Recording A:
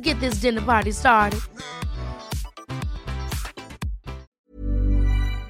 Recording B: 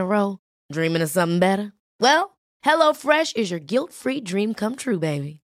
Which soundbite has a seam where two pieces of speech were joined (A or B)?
A